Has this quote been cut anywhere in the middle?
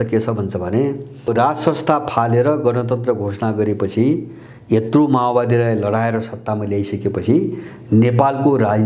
yes; 1 cut; at 1.3 s

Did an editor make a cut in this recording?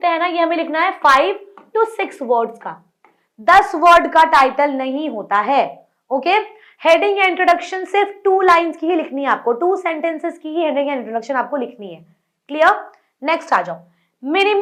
no; 0 cuts

